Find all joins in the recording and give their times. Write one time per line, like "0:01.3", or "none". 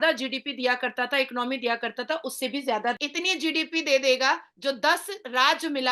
0:03.0